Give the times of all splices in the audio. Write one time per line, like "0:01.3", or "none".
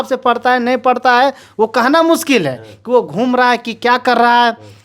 none